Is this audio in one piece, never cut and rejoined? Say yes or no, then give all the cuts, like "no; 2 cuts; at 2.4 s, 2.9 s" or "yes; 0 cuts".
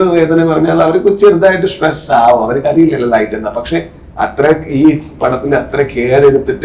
yes; 0 cuts